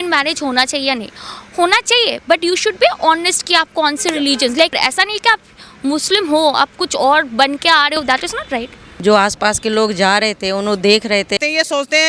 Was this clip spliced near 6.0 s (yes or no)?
no